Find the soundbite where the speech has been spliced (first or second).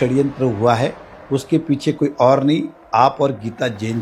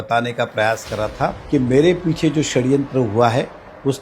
second